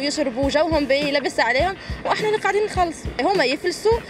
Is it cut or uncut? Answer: cut